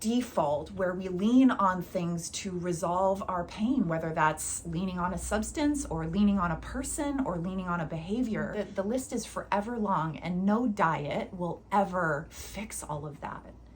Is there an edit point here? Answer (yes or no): yes